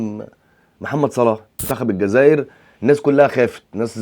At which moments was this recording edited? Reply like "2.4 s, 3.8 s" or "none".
1.7 s